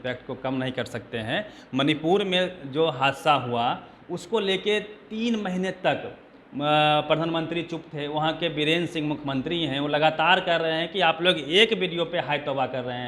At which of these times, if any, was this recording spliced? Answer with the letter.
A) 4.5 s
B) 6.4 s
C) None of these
C